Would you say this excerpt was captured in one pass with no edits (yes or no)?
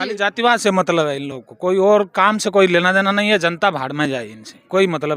yes